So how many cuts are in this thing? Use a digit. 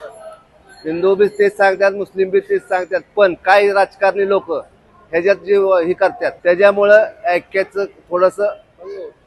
1